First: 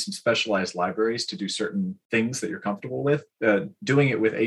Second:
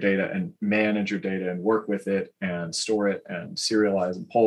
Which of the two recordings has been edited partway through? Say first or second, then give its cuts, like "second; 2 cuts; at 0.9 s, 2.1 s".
first; 2 cuts; at 2.0 s, 3.3 s